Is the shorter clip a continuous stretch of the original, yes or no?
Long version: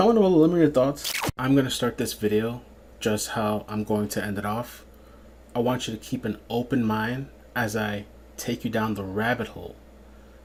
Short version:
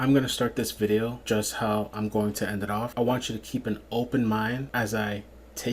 no